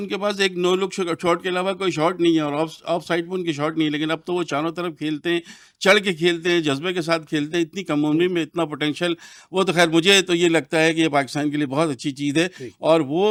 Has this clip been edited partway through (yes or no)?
no